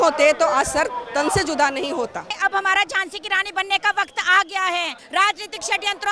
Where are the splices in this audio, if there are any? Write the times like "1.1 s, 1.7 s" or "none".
2.4 s, 5.0 s